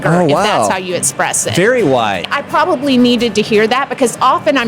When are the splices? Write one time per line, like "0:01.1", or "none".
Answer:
0:02.2